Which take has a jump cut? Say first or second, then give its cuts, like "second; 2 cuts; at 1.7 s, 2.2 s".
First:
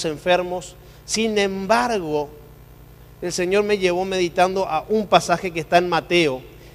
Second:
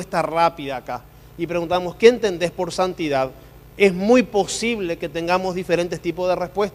second; 1 cut; at 1.7 s